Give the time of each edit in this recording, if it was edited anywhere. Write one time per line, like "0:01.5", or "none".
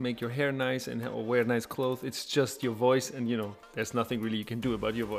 0:03.5